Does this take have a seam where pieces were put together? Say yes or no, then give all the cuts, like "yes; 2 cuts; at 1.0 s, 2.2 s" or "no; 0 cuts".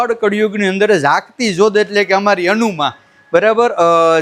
no; 0 cuts